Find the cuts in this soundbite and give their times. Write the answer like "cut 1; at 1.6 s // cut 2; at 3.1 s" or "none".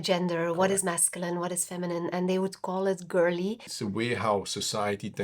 cut 1; at 3.7 s